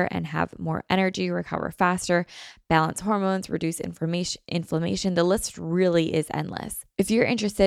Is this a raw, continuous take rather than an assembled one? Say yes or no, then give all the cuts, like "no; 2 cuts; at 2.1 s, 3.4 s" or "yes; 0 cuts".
no; 1 cut; at 6.8 s